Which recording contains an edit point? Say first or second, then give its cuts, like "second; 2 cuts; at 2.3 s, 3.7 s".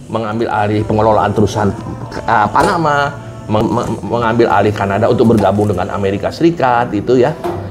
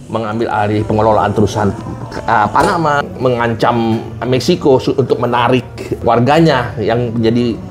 second; 2 cuts; at 3.0 s, 6.0 s